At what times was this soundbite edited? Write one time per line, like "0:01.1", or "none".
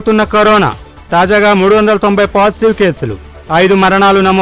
none